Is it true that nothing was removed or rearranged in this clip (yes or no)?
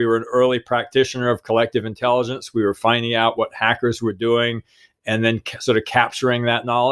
yes